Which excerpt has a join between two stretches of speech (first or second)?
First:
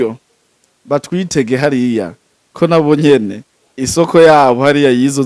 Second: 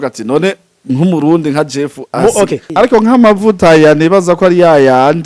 second